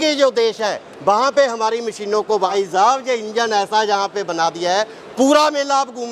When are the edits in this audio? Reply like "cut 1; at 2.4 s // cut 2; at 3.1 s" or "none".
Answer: cut 1; at 2.5 s